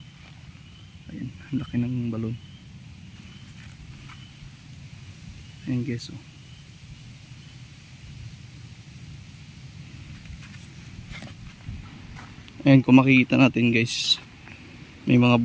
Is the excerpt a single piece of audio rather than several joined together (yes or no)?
no